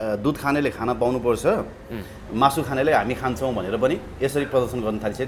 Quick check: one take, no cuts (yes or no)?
yes